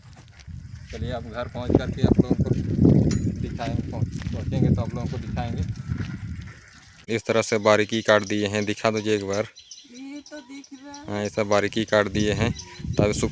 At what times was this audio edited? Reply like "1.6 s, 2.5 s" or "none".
7.0 s